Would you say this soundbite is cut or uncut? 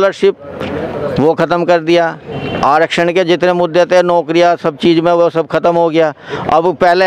uncut